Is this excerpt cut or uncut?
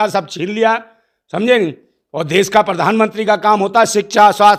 uncut